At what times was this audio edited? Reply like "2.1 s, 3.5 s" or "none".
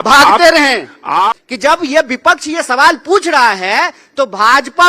1.3 s